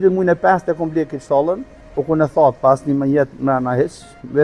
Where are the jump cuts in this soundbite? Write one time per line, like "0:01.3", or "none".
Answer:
none